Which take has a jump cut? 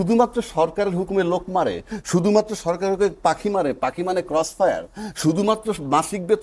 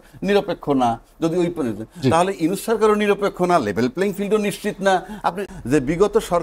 second; 1 cut; at 5.5 s

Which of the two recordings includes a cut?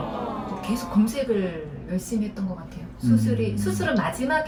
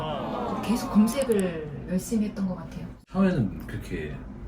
second; 1 cut; at 3.0 s

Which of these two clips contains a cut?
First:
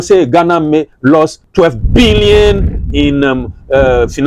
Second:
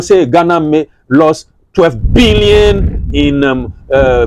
first; 1 cut; at 1.1 s

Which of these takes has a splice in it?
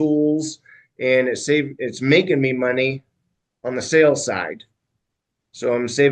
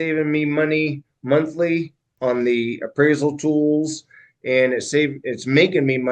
second; 1 cut; at 2.0 s

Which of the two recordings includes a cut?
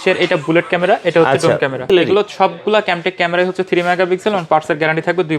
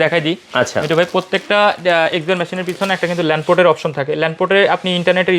first; 1 cut; at 1.8 s

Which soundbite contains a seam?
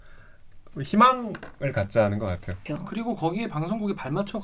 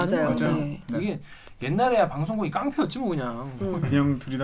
first; 1 cut; at 2.5 s

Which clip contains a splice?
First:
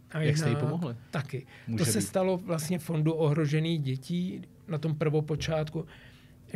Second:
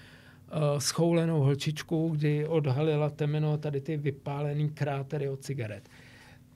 first; 1 cut; at 1.0 s

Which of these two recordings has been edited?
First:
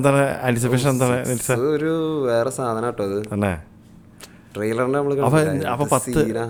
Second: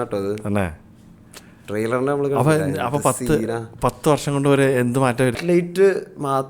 second; 1 cut; at 5.4 s

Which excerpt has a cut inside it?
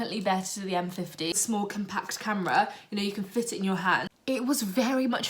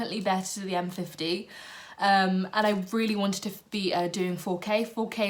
first; 2 cuts; at 1.4 s, 4.1 s

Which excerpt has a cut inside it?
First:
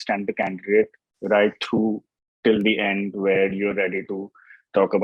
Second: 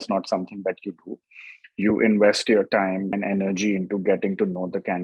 second; 1 cut; at 3.2 s

